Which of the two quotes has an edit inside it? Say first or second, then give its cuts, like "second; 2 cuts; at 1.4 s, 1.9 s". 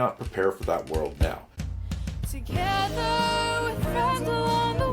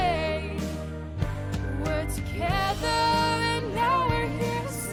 first; 1 cut; at 1.6 s